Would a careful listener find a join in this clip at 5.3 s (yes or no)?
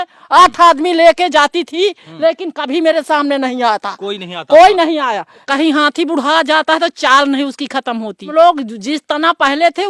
yes